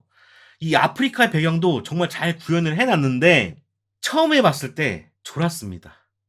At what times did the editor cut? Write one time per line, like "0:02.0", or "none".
none